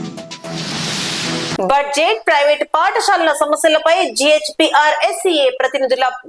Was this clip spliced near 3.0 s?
no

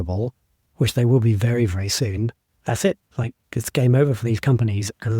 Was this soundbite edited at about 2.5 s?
yes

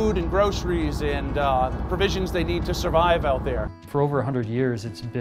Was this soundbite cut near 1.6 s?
no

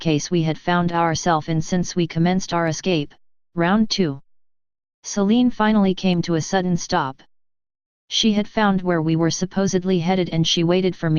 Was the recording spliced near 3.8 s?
yes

